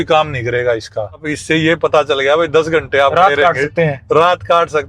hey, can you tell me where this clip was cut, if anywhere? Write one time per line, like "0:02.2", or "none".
0:01.3